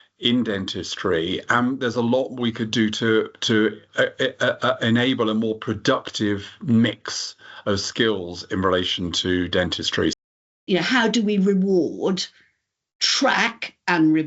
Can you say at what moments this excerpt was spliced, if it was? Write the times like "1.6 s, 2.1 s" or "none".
10.2 s

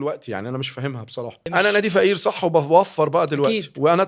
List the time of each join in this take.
1.4 s

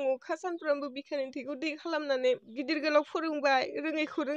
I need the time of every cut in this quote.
2.5 s

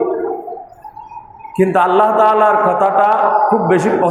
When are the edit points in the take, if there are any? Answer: none

